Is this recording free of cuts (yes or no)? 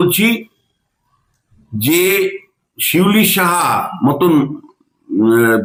yes